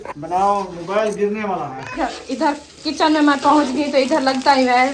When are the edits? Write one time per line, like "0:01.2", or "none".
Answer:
0:01.8